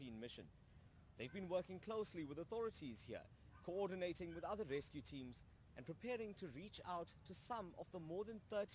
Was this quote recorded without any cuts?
no; 1 cut; at 1.0 s

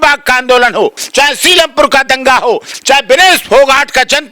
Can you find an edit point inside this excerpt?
yes; 2 cuts; at 1.0 s, 2.7 s

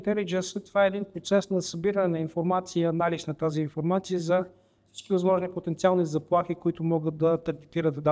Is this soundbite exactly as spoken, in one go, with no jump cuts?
yes; 0 cuts

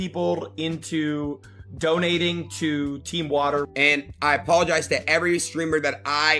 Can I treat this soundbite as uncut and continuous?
no; 1 cut; at 3.7 s

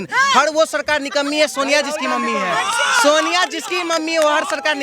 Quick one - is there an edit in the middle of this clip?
no; 0 cuts

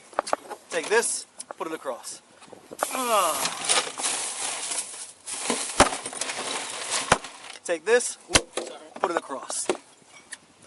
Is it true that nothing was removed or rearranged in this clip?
yes; 0 cuts

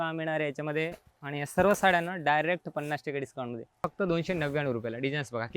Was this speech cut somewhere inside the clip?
yes; 1 cut; at 3.9 s

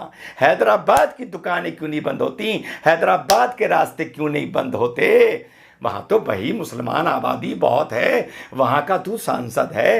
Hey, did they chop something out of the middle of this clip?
no; 0 cuts

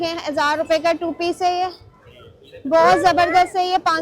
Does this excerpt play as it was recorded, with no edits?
yes; 0 cuts

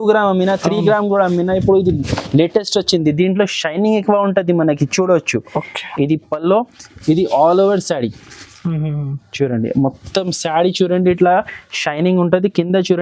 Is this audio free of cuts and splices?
yes; 0 cuts

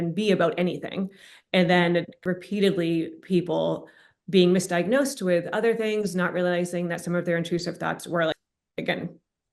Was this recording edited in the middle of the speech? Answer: no; 0 cuts

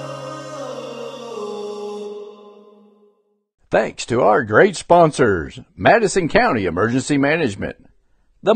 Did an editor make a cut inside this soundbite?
yes; 1 cut; at 3.6 s

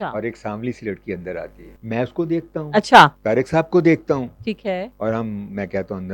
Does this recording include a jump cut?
yes; 3 cuts; at 1.7 s, 3.2 s, 4.9 s

